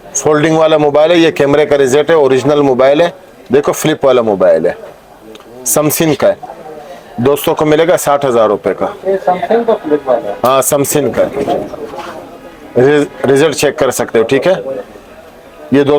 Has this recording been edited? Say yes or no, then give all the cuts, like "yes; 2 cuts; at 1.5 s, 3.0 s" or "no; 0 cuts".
no; 0 cuts